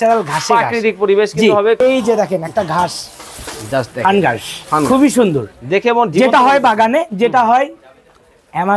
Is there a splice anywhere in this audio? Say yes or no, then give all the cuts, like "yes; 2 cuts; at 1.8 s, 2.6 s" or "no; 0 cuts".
yes; 1 cut; at 1.8 s